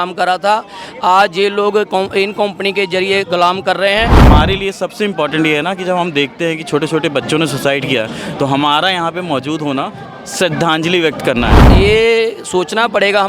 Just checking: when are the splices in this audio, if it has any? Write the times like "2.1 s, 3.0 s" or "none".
4.3 s, 11.7 s